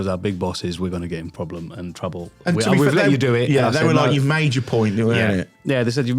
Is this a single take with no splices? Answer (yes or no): yes